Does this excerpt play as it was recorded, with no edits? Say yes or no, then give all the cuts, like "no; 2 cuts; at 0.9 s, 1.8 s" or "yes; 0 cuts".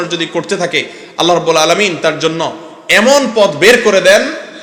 yes; 0 cuts